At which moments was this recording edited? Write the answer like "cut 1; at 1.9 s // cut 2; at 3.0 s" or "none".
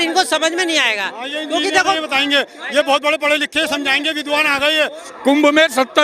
cut 1; at 5.0 s